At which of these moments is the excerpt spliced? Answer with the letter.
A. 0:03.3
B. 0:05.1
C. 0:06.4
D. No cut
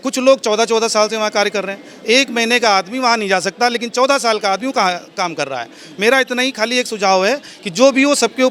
D